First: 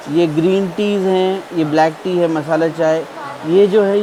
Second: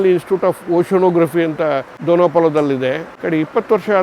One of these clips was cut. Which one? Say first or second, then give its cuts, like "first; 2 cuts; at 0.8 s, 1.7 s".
second; 2 cuts; at 1.9 s, 3.1 s